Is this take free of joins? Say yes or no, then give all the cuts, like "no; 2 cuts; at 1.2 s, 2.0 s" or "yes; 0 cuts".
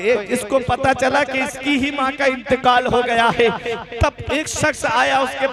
yes; 0 cuts